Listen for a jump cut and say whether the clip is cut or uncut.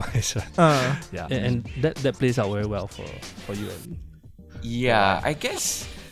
uncut